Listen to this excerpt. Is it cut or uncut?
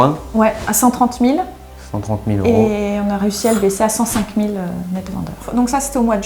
uncut